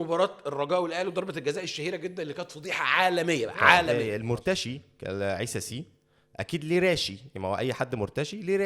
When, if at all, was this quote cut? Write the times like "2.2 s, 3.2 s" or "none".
3.9 s